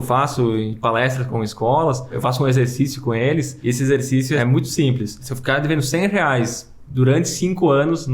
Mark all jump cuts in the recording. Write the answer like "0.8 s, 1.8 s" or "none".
1.3 s, 2.2 s, 3.5 s, 4.4 s, 5.3 s